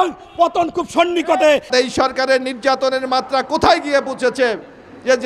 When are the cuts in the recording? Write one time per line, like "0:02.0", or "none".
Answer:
0:01.7